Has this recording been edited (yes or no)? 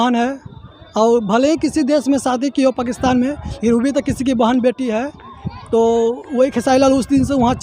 no